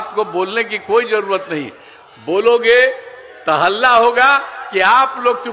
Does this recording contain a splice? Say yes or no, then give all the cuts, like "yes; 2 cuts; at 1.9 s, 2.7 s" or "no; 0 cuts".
no; 0 cuts